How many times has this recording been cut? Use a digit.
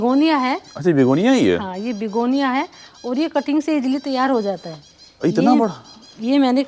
0